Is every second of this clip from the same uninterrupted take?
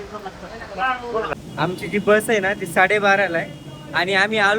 no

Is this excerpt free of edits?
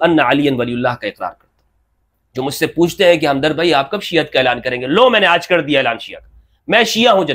yes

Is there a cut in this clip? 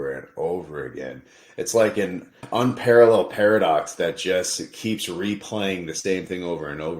yes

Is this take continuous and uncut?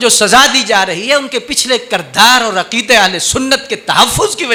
yes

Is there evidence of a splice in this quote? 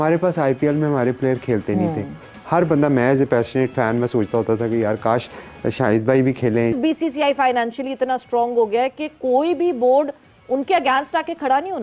yes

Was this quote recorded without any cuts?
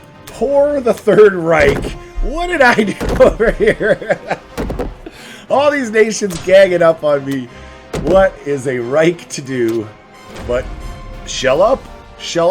yes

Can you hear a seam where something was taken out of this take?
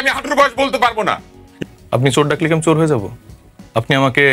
yes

